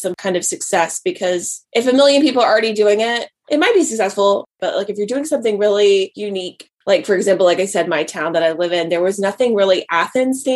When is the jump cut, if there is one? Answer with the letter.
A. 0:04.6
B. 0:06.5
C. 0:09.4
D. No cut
D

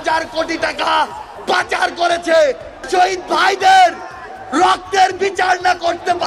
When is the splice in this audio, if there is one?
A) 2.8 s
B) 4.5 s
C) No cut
A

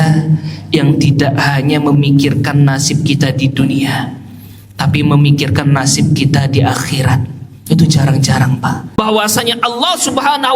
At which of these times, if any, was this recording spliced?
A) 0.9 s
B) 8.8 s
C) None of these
B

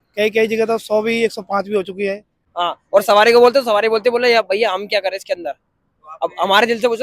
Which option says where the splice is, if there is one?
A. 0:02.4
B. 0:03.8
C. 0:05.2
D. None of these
A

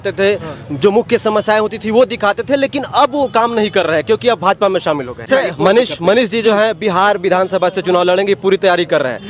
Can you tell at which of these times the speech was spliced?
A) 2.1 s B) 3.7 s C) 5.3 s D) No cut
C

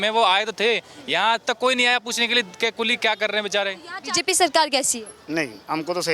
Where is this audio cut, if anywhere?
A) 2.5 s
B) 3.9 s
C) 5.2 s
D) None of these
B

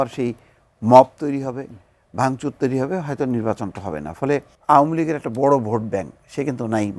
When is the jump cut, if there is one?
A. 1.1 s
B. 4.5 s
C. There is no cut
B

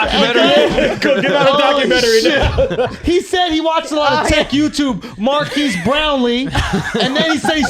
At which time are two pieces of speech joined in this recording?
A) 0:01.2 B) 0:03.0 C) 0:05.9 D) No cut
B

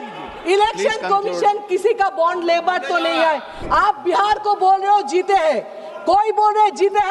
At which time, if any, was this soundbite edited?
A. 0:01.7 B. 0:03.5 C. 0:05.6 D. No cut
B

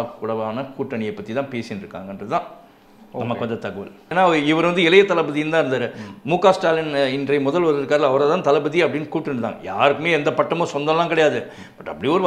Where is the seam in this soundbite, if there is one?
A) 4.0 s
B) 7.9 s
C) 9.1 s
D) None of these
A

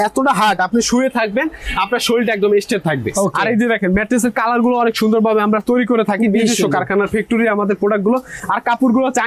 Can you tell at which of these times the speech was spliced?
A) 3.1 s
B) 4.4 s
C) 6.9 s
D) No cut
A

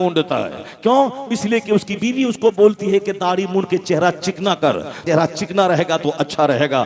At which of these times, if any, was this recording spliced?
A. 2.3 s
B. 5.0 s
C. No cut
B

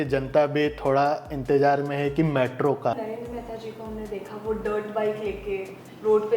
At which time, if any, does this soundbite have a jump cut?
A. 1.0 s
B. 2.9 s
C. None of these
B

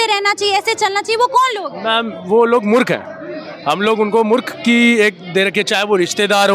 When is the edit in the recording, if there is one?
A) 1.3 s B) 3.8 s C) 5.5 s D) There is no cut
D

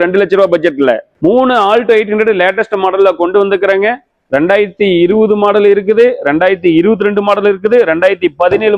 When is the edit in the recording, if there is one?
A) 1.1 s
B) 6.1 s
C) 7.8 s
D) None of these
A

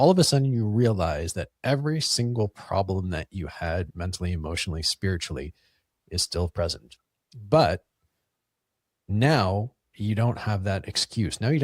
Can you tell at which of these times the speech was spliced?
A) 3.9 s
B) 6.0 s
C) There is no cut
A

